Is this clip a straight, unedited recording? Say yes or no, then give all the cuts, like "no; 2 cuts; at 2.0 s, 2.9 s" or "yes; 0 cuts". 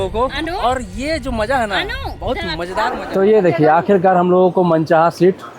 no; 1 cut; at 3.1 s